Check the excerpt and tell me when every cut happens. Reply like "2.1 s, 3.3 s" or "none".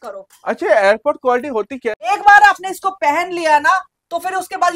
2.1 s